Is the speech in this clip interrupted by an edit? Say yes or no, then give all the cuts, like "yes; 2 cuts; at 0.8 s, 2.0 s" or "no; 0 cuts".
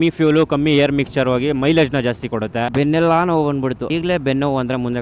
yes; 1 cut; at 2.7 s